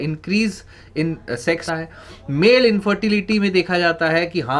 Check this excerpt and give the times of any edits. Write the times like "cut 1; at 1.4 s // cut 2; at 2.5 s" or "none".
cut 1; at 2.0 s